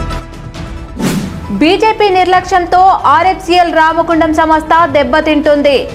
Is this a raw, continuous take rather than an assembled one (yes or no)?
yes